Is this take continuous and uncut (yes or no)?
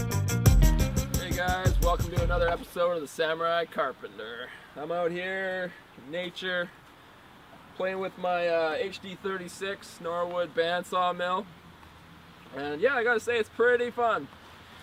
yes